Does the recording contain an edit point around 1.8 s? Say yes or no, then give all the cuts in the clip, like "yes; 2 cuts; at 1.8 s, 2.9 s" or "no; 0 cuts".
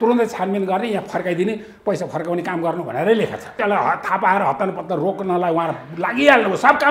no; 1 cut; at 3.5 s